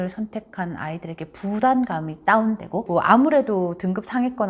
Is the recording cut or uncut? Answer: cut